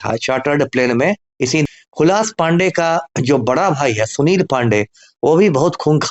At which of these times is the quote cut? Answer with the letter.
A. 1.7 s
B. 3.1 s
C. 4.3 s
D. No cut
A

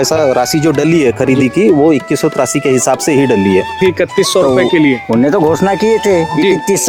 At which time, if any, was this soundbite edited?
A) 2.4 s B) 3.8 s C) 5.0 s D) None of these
B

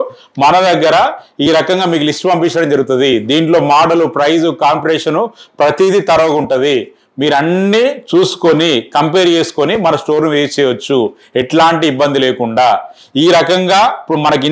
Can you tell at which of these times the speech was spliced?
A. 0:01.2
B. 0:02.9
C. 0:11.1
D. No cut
D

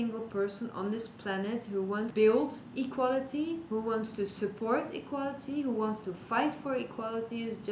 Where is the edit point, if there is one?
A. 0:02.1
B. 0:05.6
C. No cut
A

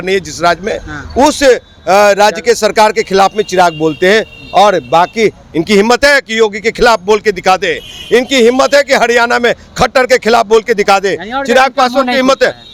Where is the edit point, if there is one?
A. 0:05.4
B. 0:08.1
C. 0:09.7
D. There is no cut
D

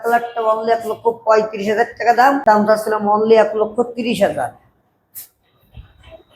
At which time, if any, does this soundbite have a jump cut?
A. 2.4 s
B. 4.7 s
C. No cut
A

